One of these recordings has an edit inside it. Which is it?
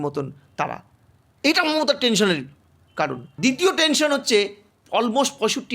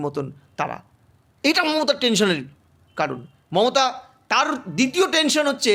first; 1 cut; at 3.3 s

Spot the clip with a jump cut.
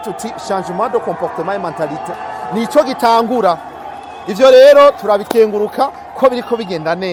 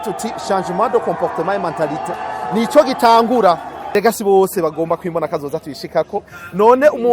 second; 1 cut; at 3.9 s

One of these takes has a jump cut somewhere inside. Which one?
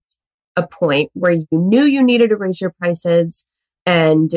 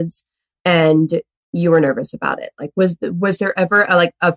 first; 1 cut; at 1.5 s

